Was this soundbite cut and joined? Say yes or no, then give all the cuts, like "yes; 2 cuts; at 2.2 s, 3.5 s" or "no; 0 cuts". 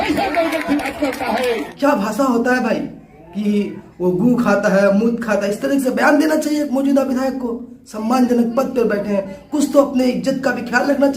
yes; 1 cut; at 1.7 s